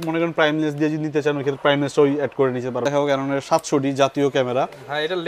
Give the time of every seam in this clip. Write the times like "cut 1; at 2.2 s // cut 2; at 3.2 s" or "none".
cut 1; at 2.8 s